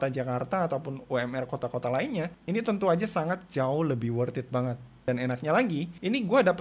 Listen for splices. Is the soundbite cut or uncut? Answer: cut